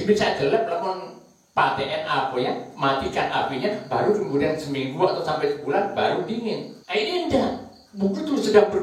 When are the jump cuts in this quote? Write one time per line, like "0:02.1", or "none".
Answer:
0:06.7